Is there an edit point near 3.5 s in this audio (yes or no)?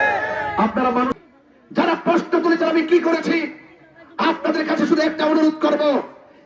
no